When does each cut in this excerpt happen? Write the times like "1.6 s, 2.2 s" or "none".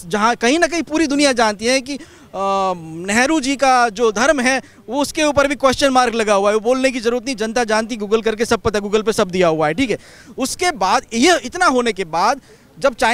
none